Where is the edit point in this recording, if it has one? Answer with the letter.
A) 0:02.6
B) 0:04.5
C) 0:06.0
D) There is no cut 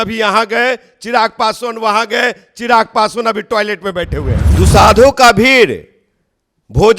B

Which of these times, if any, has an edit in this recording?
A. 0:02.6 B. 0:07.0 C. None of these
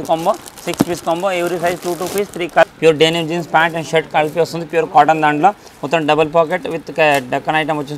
A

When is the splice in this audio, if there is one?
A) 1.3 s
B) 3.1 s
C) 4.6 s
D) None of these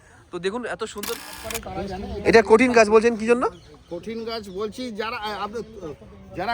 A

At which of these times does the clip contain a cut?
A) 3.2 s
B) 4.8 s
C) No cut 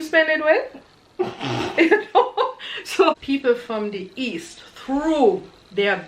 A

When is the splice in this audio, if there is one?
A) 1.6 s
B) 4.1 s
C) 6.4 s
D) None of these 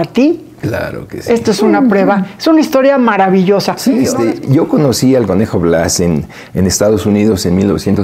B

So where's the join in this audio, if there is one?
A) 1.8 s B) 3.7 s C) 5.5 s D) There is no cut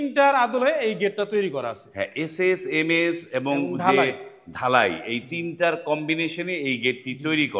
D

